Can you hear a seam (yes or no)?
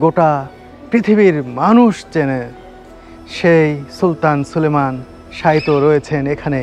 no